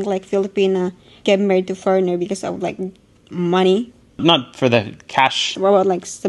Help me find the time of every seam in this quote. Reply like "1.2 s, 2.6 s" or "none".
1.0 s, 4.2 s